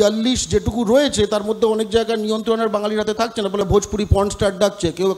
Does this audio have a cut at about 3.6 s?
yes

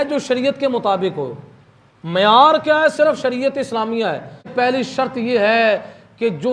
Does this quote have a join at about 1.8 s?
no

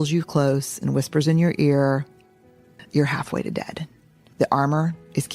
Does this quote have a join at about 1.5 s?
no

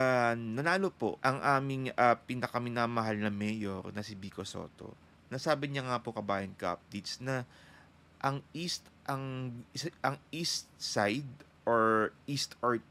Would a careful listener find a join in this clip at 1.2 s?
yes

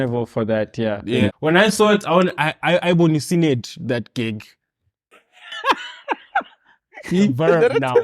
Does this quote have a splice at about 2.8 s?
no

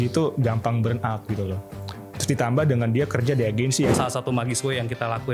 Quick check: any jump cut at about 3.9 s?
yes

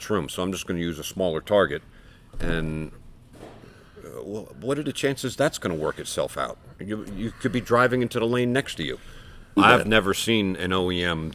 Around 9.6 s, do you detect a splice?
yes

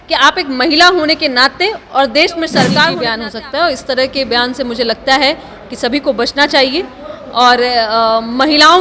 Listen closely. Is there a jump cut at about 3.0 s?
yes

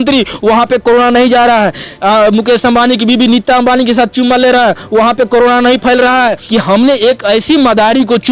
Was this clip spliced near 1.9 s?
no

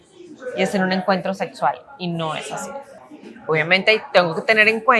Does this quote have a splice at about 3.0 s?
yes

